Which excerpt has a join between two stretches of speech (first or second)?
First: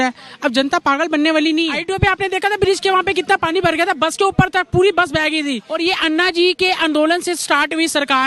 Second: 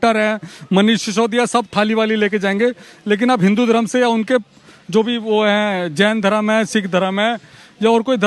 first